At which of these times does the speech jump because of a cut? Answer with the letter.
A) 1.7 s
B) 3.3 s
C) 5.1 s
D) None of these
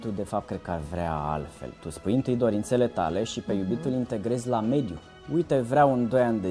C